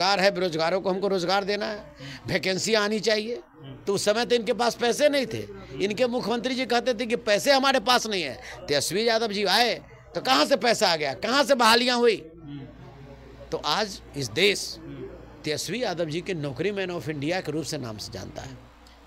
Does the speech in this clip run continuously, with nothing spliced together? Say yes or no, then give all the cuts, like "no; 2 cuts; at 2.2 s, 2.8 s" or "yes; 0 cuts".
yes; 0 cuts